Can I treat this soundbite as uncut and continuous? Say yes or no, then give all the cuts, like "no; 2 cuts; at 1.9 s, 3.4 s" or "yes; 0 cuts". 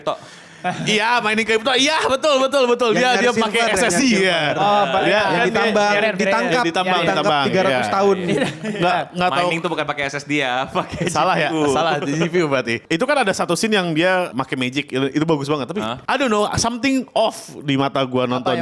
no; 2 cuts; at 12.8 s, 14.3 s